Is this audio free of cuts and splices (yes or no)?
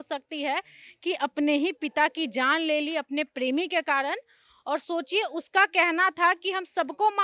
yes